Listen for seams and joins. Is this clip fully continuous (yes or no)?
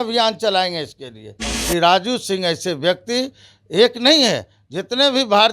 no